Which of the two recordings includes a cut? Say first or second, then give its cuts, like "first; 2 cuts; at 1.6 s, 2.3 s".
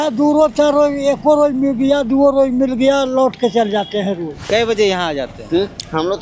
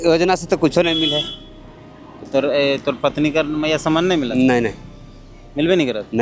first; 1 cut; at 4.5 s